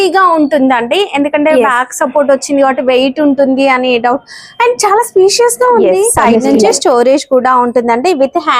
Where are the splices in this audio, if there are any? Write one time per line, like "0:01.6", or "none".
0:06.1

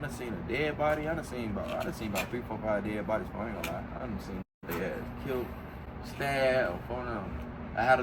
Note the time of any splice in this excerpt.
none

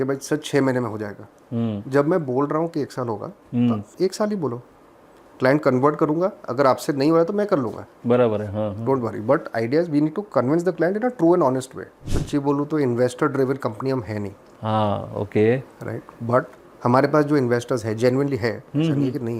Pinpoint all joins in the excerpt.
0:12.0
0:16.6

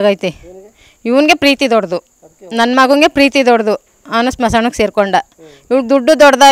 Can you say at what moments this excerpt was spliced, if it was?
none

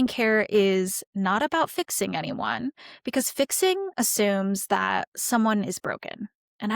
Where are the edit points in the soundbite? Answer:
0:01.1

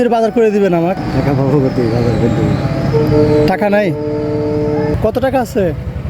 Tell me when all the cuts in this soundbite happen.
0:01.0
0:04.9

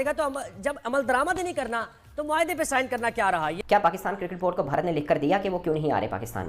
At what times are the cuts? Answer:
0:03.6

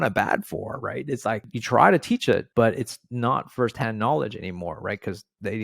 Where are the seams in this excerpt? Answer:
0:01.5
0:02.5

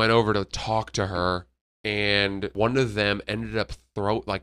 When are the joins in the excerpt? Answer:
0:02.5

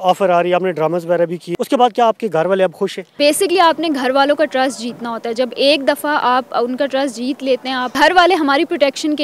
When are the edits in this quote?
0:01.4
0:03.1
0:07.9

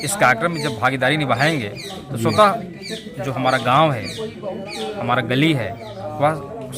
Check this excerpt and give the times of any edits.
none

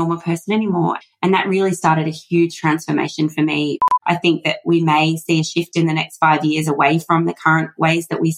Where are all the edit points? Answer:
0:01.0
0:03.8

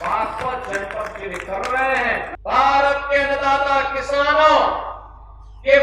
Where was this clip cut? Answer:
0:02.3

